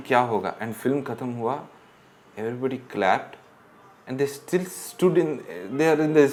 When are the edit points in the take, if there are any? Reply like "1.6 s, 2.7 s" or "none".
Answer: none